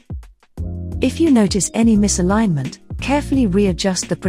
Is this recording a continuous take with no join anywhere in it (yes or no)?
no